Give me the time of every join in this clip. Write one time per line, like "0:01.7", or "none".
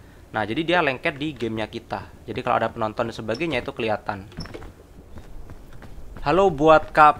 none